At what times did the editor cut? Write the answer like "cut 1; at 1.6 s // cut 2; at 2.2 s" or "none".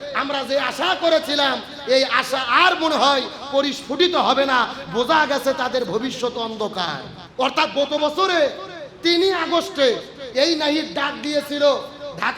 cut 1; at 7.2 s

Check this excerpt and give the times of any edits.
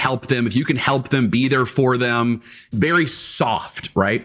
cut 1; at 2.7 s

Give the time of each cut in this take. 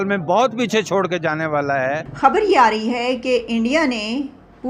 cut 1; at 2.2 s

